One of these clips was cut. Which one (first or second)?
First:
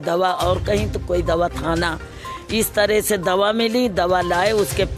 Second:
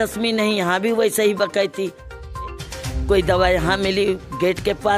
second